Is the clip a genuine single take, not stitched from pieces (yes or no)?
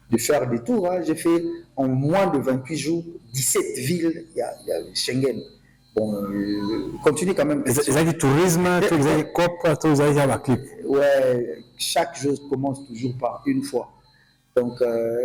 yes